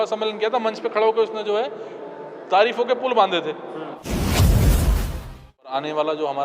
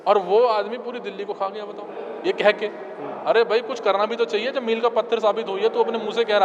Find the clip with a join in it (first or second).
first